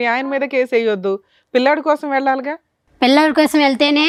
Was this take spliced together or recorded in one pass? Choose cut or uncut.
uncut